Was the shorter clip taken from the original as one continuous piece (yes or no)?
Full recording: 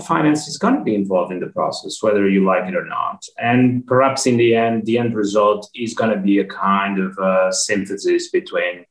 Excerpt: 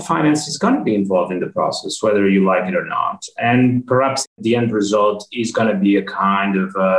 no